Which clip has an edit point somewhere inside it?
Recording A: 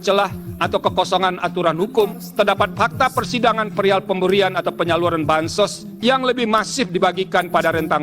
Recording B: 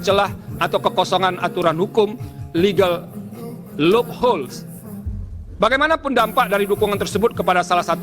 A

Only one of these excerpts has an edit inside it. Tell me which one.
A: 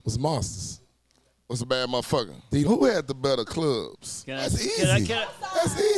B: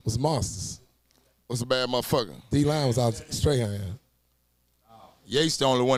A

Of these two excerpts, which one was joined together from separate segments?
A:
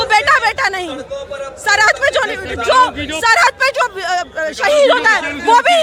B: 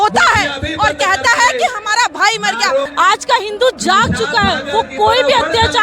B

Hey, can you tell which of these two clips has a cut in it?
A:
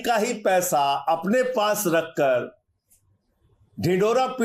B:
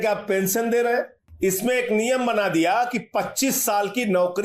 B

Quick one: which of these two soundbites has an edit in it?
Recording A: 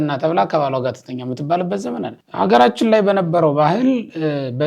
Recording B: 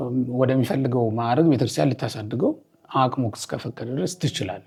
A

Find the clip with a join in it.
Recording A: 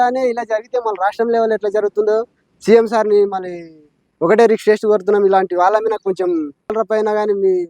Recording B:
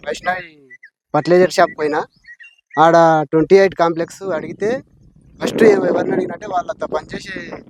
A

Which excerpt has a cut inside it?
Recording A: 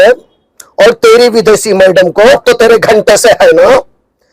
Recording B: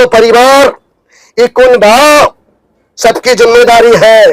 A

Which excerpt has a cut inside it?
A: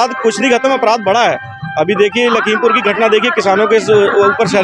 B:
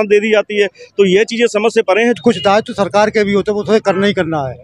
B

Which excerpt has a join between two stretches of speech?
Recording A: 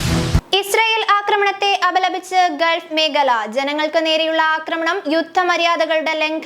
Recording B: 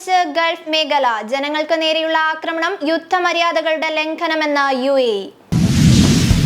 B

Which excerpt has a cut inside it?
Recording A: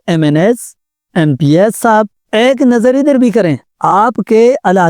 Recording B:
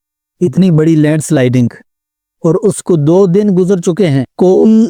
A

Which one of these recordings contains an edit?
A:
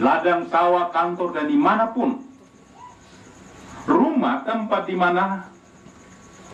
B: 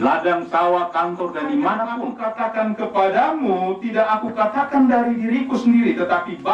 B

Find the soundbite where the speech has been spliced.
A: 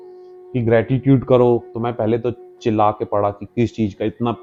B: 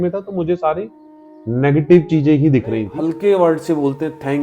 B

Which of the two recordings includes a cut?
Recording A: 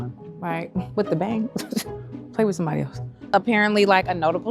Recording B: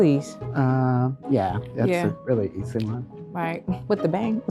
A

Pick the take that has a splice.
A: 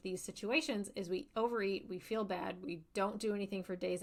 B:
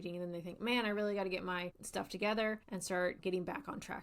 B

